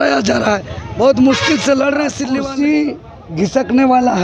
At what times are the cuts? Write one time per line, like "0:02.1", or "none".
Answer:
0:02.2

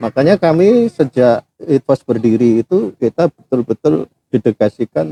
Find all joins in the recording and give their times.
none

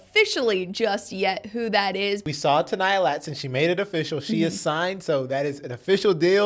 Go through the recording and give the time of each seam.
0:02.2

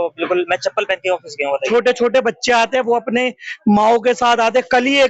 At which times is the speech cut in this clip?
0:01.6

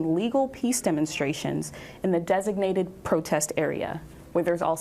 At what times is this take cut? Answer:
none

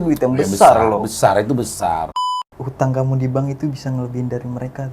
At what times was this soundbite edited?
0:02.2

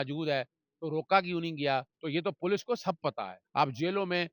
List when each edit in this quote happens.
0:02.0
0:03.4

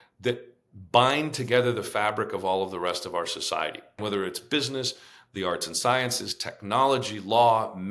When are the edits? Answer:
0:04.0

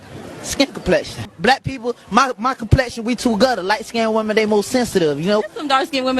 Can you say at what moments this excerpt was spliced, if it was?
0:01.3

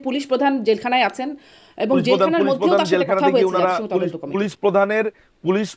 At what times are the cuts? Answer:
none

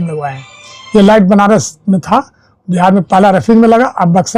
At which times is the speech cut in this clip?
none

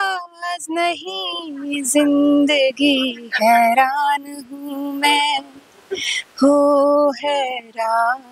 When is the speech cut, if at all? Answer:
none

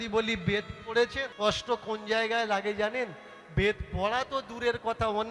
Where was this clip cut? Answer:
0:01.2

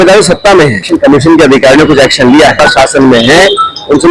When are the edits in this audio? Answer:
0:00.9
0:02.5

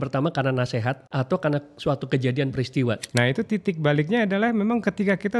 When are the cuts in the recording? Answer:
0:01.0
0:03.0

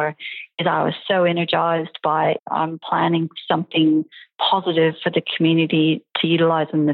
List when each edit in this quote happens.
0:02.5

